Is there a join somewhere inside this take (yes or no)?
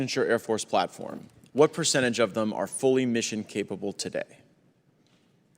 no